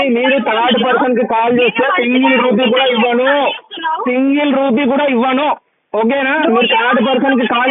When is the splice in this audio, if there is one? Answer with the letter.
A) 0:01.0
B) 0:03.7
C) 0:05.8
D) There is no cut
D